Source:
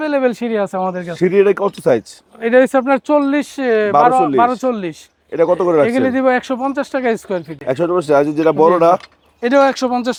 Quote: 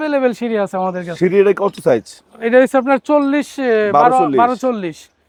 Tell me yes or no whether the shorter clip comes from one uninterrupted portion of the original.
yes